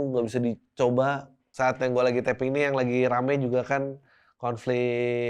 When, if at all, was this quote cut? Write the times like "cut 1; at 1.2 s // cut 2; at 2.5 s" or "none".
cut 1; at 1.4 s

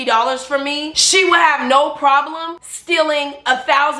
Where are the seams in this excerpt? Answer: none

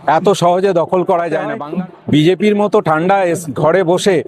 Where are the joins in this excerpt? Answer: cut 1; at 1.6 s

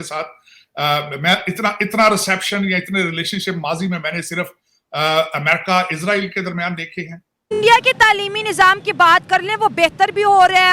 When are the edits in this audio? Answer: cut 1; at 7.4 s

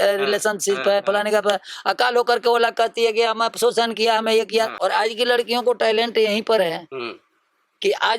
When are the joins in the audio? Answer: cut 1; at 4.7 s

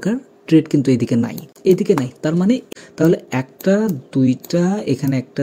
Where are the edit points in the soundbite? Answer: cut 1; at 1.4 s // cut 2; at 2.6 s

